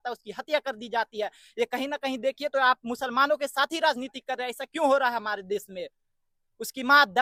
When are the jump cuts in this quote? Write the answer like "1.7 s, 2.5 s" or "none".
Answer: none